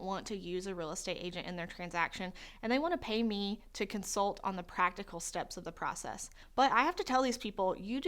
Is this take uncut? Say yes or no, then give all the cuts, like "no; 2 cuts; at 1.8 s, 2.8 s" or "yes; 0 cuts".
no; 1 cut; at 6.4 s